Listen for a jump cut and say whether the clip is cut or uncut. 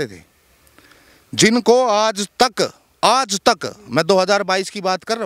uncut